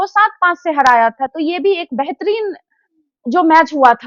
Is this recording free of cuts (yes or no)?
yes